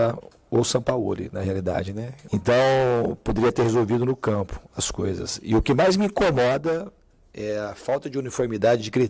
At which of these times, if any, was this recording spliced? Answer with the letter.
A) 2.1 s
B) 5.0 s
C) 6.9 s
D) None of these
A